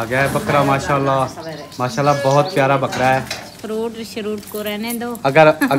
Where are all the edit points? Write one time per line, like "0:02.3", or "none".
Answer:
0:03.5